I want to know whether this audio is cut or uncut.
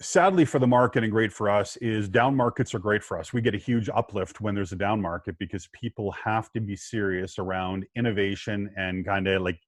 uncut